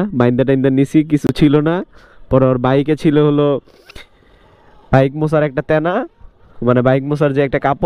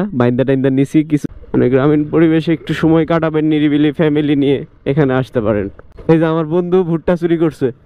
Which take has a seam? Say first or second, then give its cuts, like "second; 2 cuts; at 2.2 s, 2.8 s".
second; 2 cuts; at 1.3 s, 5.8 s